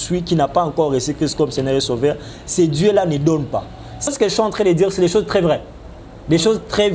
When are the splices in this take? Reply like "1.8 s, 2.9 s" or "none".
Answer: 4.1 s